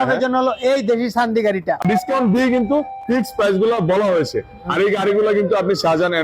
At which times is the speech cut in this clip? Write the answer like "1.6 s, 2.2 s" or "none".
1.8 s